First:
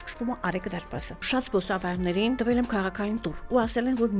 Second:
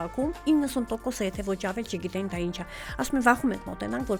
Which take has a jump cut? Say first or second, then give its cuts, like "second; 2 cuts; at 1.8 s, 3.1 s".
first; 2 cuts; at 1.2 s, 2.4 s